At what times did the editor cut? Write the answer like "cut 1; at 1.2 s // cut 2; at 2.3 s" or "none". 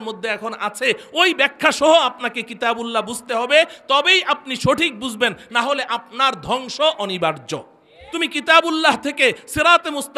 cut 1; at 8.0 s